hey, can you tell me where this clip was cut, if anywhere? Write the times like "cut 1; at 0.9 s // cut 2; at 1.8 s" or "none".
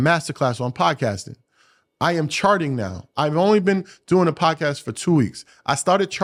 none